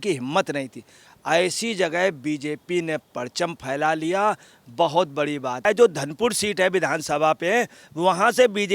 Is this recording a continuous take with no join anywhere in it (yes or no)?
no